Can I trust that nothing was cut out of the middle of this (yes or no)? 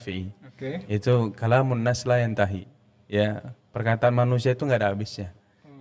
yes